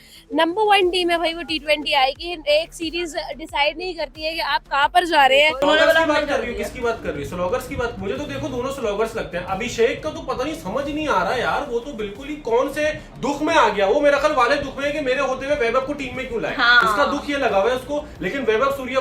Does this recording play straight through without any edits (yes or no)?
no